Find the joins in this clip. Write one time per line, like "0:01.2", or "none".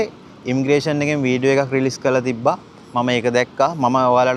none